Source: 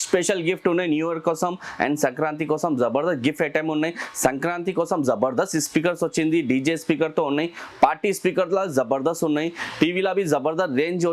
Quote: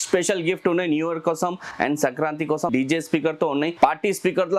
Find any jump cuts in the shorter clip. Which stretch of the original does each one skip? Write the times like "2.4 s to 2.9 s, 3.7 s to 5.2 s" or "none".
2.7 s to 6.4 s, 7.5 s to 7.7 s